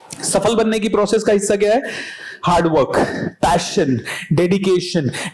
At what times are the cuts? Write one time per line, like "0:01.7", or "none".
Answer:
none